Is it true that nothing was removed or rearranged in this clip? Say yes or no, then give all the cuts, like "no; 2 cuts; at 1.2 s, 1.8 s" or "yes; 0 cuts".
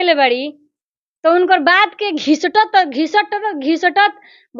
yes; 0 cuts